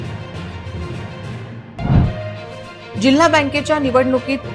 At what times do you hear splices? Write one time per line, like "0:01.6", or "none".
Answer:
0:01.2